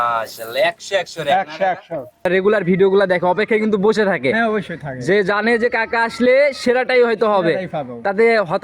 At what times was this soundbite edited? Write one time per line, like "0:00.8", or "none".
0:02.3